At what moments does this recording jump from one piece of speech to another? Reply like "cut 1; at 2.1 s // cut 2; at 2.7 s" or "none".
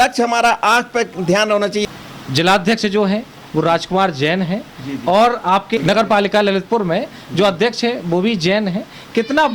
cut 1; at 1.8 s // cut 2; at 5.8 s